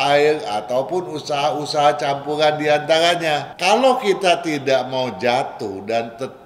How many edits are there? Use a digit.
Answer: 1